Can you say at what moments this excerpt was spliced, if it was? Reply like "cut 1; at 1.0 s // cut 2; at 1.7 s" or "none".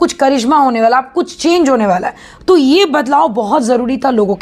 none